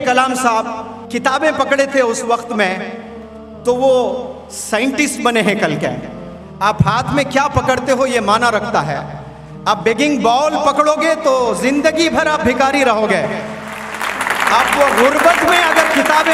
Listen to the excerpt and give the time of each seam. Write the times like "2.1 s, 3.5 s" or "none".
none